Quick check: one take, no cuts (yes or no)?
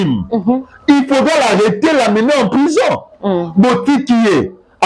yes